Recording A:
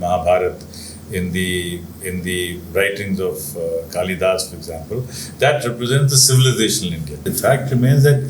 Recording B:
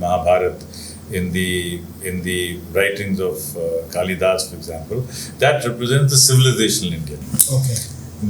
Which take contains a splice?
A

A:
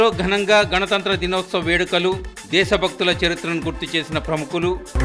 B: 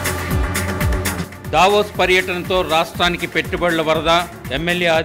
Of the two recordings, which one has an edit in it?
B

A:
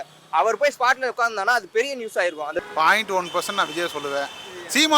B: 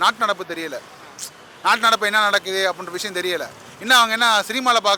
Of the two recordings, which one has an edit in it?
A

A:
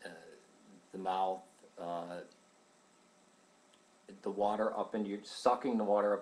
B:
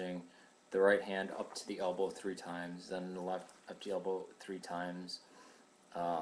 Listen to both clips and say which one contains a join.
A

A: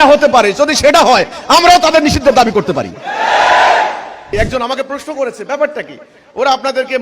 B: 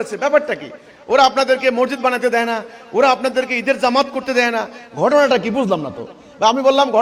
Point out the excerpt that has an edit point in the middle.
A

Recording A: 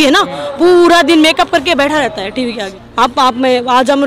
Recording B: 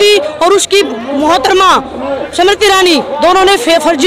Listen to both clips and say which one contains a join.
A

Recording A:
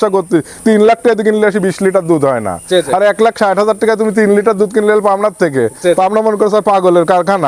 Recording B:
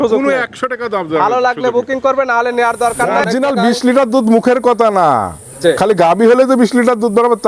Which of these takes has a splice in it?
B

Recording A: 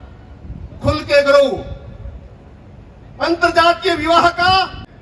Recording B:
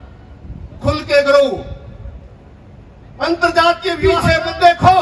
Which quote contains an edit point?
B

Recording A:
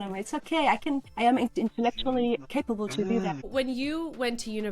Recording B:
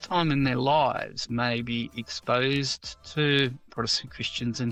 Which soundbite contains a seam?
A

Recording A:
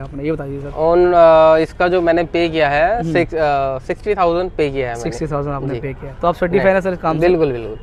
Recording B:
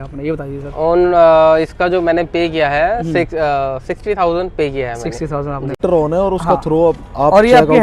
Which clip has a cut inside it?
B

